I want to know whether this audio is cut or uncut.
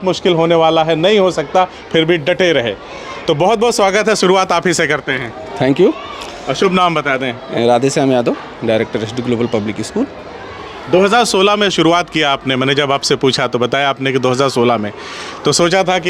uncut